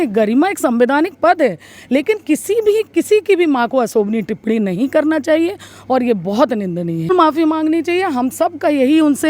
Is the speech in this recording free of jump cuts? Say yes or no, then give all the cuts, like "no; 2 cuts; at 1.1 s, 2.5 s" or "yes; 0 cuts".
no; 1 cut; at 7.1 s